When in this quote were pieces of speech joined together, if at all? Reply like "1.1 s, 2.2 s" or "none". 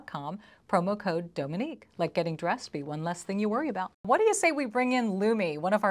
3.9 s